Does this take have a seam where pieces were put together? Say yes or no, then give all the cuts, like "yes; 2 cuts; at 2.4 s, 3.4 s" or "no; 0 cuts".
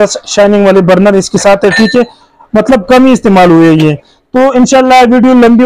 no; 0 cuts